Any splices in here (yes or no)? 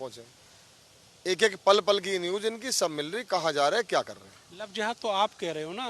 no